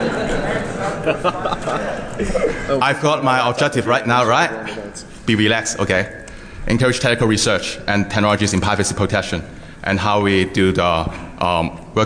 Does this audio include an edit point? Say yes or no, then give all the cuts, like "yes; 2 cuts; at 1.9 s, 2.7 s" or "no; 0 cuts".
yes; 1 cut; at 4.1 s